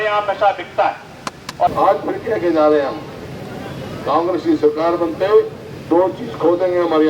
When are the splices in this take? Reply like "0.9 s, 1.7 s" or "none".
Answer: 1.7 s